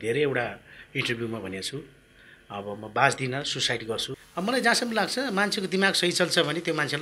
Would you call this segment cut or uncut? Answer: cut